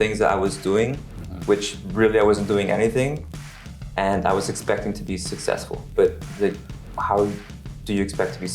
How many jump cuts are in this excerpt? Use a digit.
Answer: 1